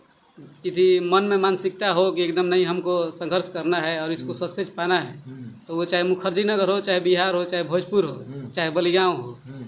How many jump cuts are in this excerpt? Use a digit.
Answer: 0